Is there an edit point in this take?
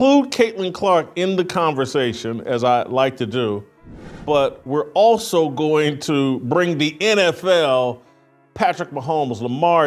no; 0 cuts

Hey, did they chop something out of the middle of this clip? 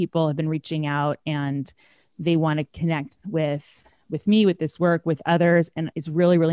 no; 0 cuts

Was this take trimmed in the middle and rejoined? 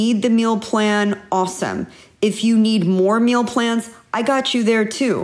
no; 0 cuts

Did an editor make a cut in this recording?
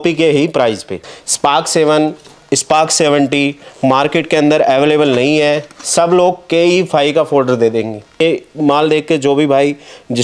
yes; 2 cuts; at 1.0 s, 8.2 s

